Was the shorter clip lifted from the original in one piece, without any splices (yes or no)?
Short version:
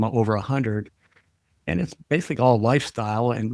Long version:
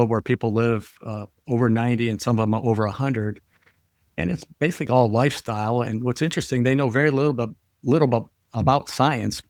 yes